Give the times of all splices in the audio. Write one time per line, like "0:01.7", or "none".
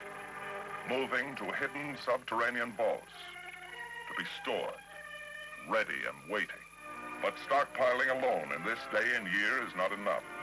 0:06.0